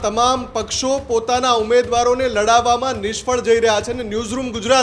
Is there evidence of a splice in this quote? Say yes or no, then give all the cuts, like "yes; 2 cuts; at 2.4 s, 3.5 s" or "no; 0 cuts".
no; 0 cuts